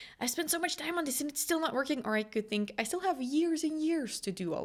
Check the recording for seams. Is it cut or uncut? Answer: uncut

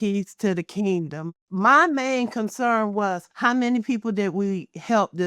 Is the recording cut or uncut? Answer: cut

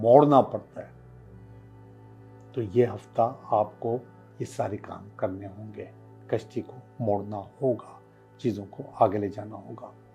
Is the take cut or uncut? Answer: uncut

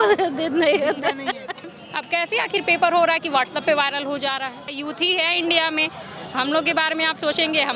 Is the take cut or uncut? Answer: cut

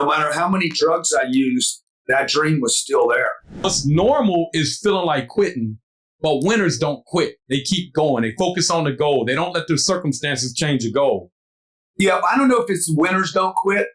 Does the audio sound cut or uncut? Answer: cut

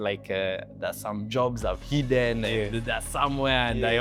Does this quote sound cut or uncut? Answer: uncut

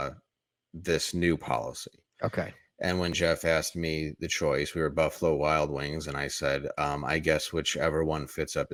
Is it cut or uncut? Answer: uncut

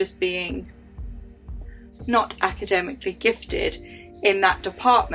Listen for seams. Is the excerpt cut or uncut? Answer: uncut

